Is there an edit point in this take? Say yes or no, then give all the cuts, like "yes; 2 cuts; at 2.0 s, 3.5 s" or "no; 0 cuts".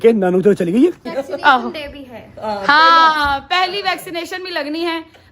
yes; 1 cut; at 1.1 s